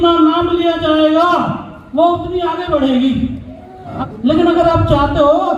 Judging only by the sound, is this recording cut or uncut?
cut